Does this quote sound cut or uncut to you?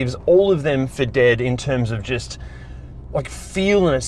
uncut